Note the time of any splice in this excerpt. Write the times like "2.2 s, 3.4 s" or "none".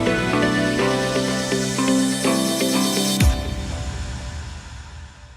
2.1 s